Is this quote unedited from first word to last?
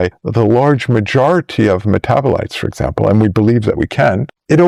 yes; 0 cuts

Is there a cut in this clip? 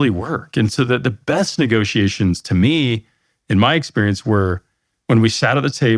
no; 0 cuts

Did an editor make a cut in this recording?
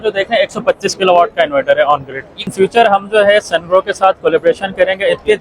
yes; 1 cut; at 2.4 s

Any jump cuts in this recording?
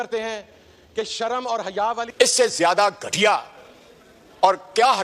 yes; 1 cut; at 2.1 s

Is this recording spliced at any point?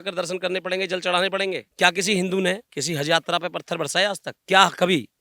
yes; 2 cuts; at 1.7 s, 4.3 s

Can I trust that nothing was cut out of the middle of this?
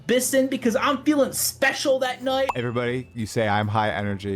no; 1 cut; at 2.5 s

